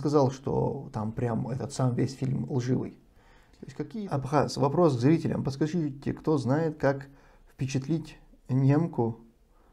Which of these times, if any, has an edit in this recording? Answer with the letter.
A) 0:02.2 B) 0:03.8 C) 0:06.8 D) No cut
B